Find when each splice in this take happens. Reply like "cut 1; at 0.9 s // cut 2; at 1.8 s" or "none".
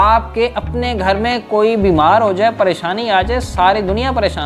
none